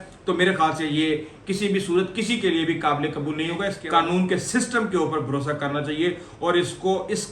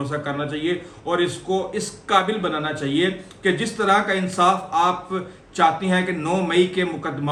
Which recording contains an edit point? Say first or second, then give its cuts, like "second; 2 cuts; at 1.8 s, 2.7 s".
first; 1 cut; at 3.8 s